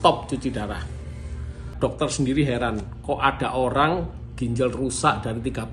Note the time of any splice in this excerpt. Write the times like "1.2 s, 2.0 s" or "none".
1.7 s

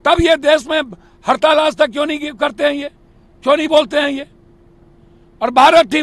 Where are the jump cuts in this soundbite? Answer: none

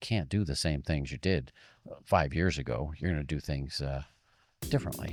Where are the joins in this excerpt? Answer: none

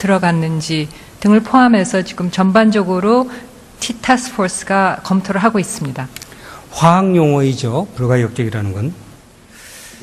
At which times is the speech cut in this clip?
8.2 s

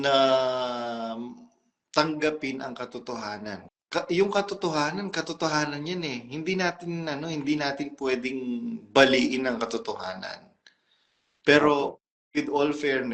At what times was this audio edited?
3.6 s

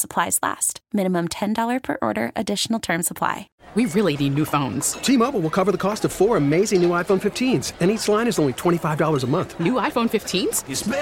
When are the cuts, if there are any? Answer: 3.5 s

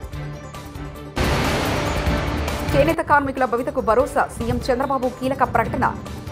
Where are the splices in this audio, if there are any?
0.8 s, 2.7 s

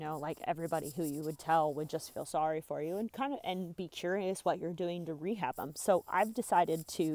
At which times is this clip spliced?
none

